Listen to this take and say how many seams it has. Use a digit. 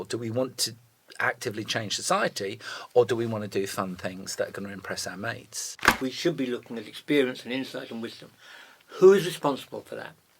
1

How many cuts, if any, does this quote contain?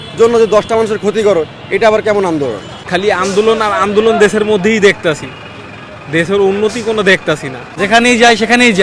2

